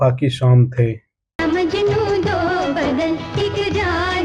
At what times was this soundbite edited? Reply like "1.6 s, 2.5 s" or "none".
1.3 s